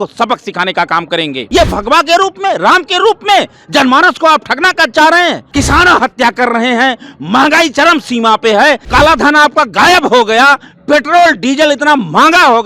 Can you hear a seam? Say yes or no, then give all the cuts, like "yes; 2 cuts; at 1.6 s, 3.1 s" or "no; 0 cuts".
yes; 3 cuts; at 1.4 s, 5.4 s, 8.8 s